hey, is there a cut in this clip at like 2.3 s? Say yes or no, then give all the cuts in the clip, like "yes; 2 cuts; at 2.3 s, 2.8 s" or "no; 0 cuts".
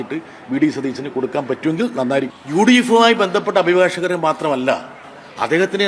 yes; 1 cut; at 2.3 s